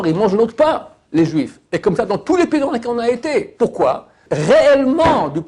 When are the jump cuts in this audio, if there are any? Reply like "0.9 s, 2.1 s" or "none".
4.2 s

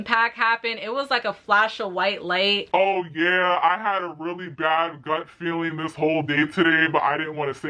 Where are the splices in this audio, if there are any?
2.7 s

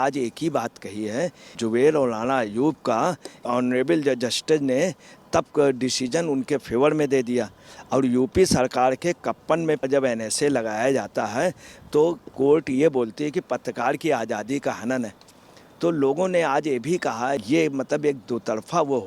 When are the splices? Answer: 1.6 s, 3.5 s, 9.9 s, 17.4 s

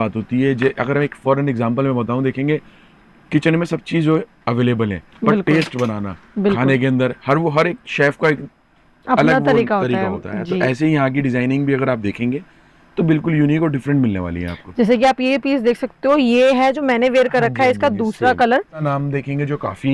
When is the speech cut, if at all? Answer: 18.8 s

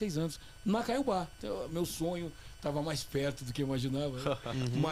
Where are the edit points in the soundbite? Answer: none

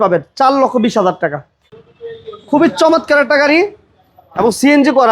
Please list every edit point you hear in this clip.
1.7 s

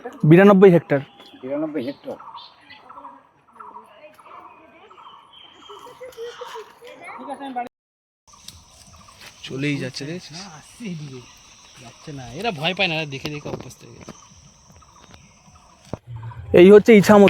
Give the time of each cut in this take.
7.7 s, 16.1 s

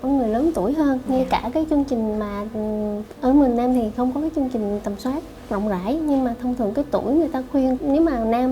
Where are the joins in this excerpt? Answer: none

